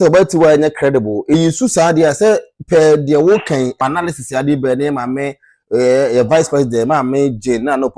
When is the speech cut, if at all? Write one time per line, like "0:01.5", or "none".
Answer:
0:01.3
0:03.8